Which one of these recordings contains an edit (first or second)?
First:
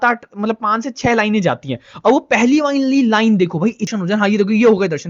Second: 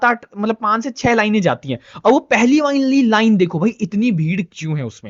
first